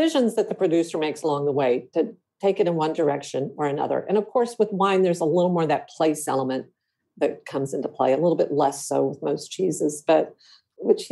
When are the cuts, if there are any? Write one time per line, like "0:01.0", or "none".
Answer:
none